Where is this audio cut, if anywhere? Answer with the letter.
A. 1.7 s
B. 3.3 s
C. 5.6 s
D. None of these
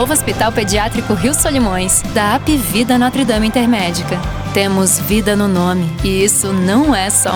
D